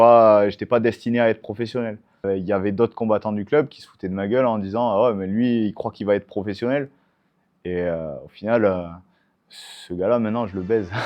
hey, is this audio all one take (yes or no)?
no